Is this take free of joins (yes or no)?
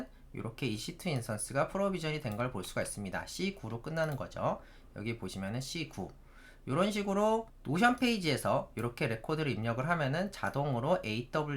yes